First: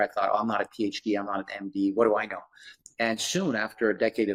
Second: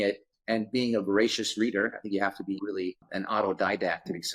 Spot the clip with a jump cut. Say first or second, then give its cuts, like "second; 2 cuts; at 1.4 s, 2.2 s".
second; 1 cut; at 3.0 s